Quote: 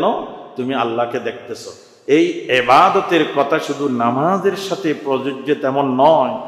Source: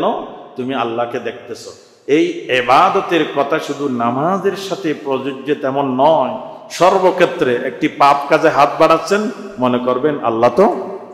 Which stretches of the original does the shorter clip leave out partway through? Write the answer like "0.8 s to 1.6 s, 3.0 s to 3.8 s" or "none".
none